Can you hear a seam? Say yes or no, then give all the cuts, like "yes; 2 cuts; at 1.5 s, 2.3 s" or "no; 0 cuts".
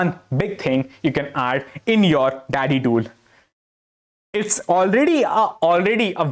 no; 0 cuts